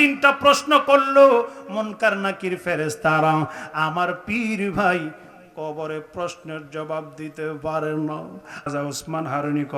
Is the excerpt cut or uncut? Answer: cut